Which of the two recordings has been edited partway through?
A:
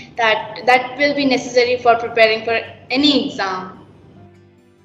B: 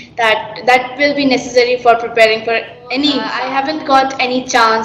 B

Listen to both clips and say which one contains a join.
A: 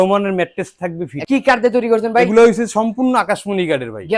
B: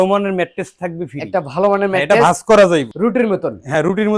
A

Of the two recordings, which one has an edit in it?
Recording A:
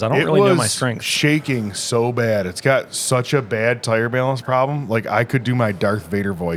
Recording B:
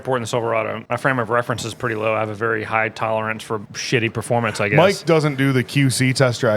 B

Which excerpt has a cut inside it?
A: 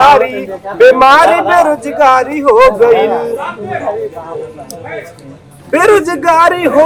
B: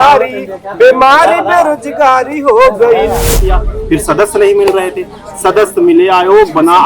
B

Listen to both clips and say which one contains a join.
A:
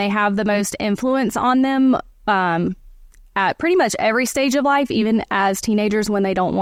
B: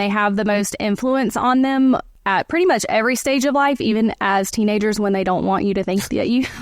B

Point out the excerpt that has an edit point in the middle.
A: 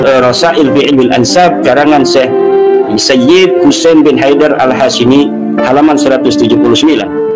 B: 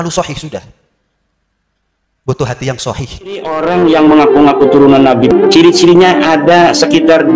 B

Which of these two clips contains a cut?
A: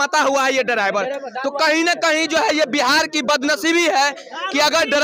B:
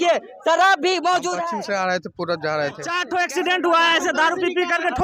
B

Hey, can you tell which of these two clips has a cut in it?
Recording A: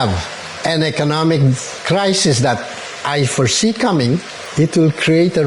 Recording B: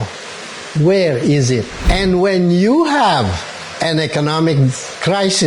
B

